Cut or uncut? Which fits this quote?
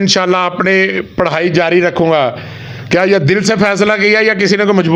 uncut